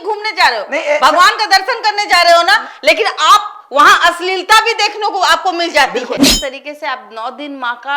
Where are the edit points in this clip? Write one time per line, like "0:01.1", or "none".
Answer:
0:06.3